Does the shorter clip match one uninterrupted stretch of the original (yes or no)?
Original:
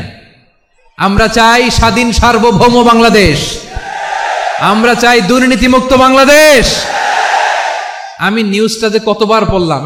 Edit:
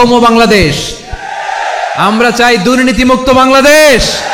yes